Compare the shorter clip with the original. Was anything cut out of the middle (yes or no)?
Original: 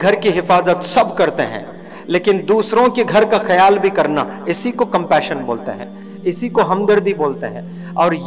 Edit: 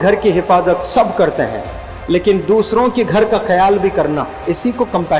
no